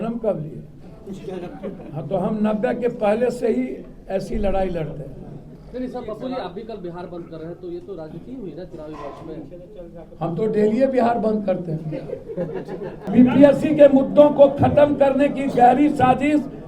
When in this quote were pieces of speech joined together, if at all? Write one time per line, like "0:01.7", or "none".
0:05.5
0:13.0

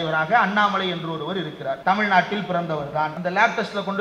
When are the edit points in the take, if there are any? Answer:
0:01.8
0:03.2

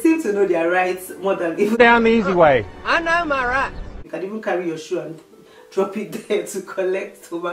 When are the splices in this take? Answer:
0:01.8
0:04.0

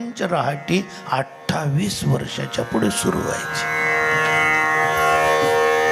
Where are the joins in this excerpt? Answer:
none

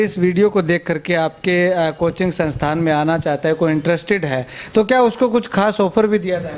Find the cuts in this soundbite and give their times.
none

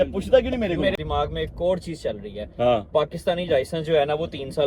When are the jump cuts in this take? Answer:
none

